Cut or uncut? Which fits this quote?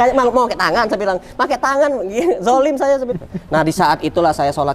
cut